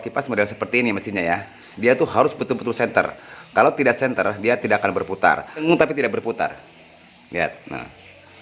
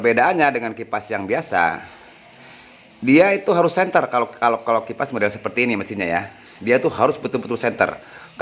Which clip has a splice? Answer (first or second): first